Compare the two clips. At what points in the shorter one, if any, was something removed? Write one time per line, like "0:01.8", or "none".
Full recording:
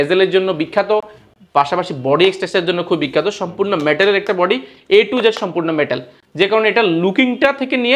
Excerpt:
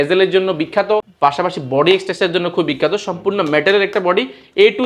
0:01.1